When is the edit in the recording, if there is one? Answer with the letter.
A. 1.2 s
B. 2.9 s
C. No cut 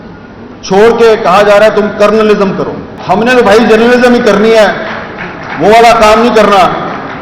B